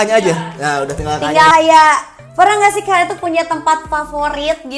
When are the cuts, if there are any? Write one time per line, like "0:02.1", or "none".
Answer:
0:01.5